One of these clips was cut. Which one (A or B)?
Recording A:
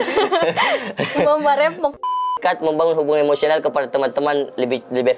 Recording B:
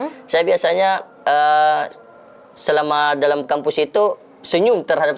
A